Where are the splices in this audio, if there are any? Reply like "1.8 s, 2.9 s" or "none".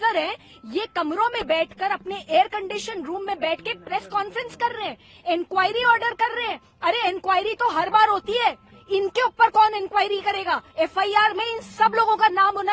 none